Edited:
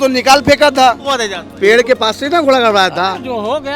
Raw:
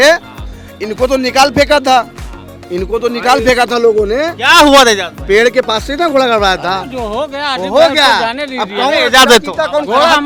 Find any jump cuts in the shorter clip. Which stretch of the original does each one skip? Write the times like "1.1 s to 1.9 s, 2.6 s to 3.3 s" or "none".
2.5 s to 5.1 s